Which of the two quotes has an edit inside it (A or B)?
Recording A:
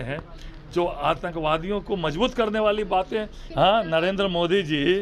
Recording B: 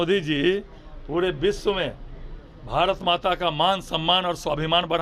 A